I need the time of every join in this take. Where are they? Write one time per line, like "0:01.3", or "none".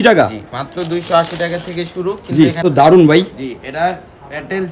0:02.6